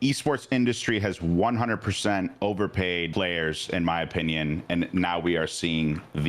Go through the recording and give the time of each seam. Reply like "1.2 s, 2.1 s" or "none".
3.1 s